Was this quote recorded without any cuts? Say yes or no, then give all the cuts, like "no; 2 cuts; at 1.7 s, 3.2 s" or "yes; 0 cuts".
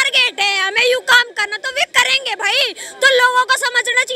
yes; 0 cuts